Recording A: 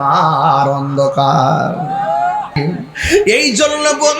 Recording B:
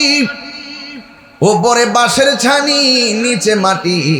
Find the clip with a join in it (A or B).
A